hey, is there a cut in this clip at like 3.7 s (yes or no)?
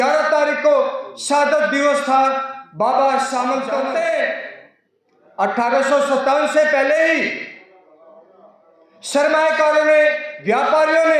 yes